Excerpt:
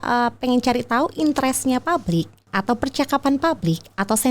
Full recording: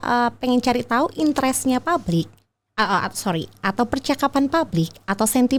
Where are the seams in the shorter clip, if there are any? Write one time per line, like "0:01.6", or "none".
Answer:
0:02.4